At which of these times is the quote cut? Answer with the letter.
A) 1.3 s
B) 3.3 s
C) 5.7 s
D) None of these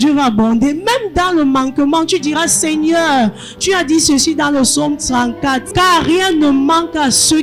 C